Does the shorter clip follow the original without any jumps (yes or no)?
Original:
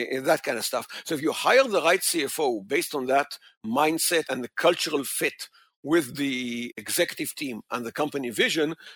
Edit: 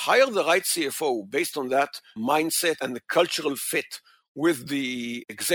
no